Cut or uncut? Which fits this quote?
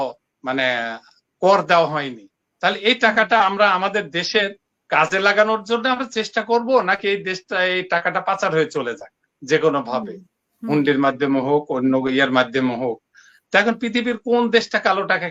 uncut